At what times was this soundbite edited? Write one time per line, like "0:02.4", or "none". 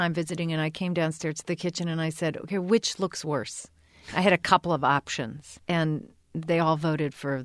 0:05.6